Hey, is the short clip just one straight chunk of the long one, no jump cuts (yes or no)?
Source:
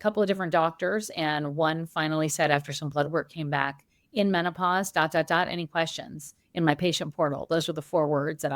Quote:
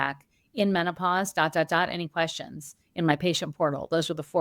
yes